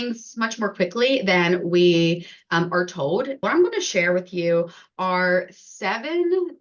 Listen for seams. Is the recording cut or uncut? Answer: cut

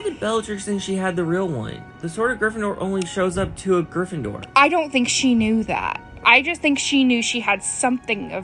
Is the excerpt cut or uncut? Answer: uncut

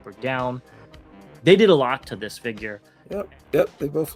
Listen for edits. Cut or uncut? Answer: cut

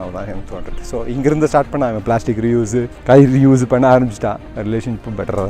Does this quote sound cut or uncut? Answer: cut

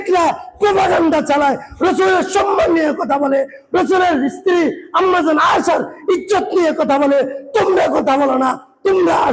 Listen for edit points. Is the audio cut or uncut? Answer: uncut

